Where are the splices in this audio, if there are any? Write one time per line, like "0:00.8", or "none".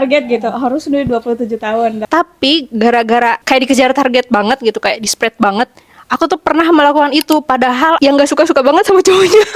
0:02.0